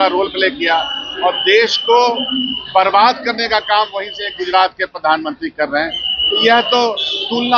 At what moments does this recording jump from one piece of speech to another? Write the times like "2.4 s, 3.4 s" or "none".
none